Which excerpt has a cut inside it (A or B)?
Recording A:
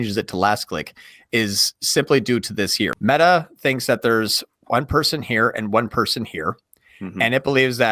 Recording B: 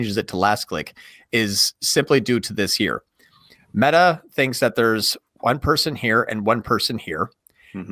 A